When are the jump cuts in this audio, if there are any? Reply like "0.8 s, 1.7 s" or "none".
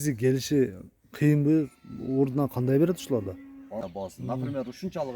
3.8 s